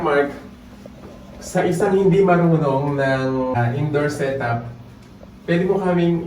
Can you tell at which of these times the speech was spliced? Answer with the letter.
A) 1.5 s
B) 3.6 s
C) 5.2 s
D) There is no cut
B